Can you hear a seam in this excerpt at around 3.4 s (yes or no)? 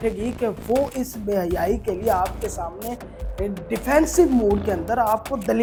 no